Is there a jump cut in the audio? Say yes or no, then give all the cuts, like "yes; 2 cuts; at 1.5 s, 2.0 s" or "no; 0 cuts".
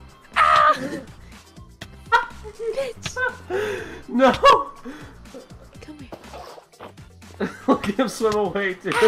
no; 0 cuts